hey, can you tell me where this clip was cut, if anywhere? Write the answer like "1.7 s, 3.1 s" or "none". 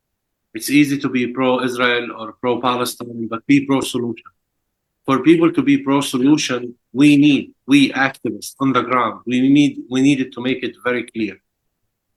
none